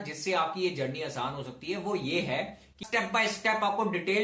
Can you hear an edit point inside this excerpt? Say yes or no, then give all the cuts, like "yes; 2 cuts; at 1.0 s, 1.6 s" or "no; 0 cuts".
yes; 1 cut; at 2.8 s